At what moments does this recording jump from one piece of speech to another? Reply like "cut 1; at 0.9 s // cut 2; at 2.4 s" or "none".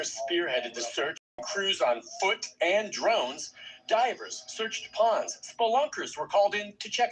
cut 1; at 1.3 s